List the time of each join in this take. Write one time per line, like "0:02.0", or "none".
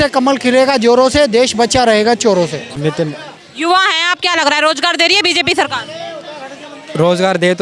0:02.7